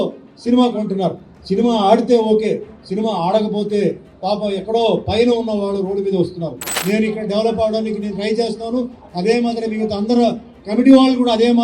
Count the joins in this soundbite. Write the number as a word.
one